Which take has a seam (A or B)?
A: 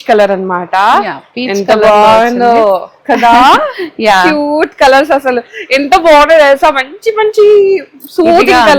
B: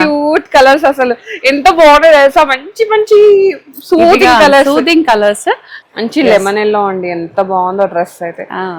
B